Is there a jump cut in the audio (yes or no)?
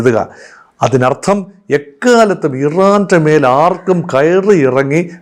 no